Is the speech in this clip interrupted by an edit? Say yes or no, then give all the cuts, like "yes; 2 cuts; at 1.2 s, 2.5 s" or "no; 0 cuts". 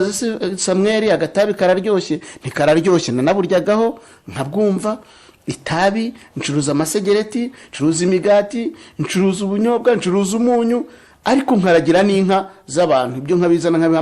no; 0 cuts